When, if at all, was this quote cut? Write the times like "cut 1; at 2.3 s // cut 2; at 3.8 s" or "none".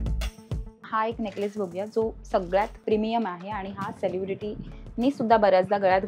cut 1; at 0.8 s // cut 2; at 2.8 s